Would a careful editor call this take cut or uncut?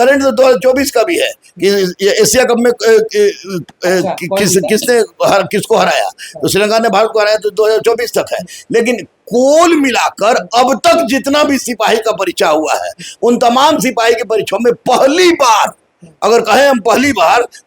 uncut